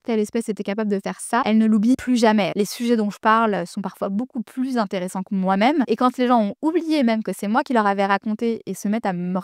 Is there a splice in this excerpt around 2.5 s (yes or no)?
yes